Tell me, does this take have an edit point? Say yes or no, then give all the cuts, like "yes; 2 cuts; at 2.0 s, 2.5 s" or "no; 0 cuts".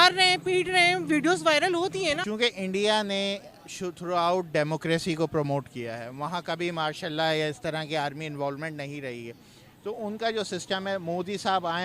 yes; 1 cut; at 2.2 s